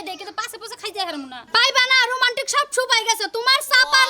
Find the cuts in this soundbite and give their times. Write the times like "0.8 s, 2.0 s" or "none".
1.4 s